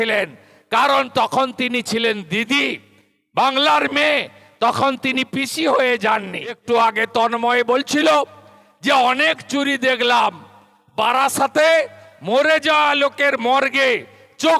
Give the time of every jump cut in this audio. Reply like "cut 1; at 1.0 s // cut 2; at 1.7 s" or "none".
cut 1; at 6.6 s